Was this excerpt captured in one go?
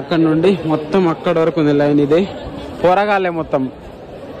yes; 0 cuts

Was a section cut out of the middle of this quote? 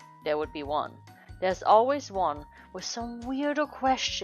no; 0 cuts

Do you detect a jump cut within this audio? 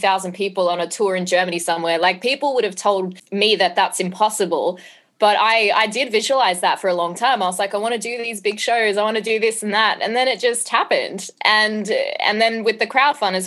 yes; 1 cut; at 3.2 s

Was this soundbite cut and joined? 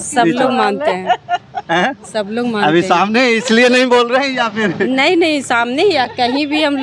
no; 0 cuts

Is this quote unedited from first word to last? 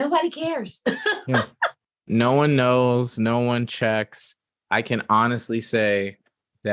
yes; 0 cuts

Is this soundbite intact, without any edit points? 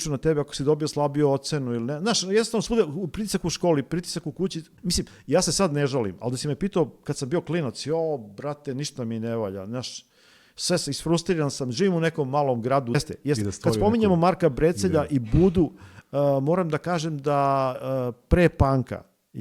no; 2 cuts; at 4.7 s, 13.0 s

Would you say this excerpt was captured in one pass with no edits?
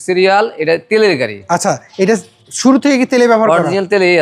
yes; 0 cuts

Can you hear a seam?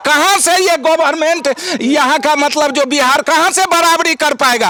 no; 0 cuts

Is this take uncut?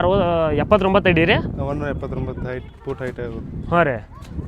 yes; 0 cuts

